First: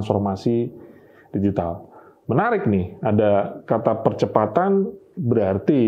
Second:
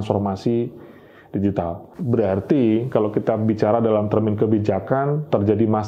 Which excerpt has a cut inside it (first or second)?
second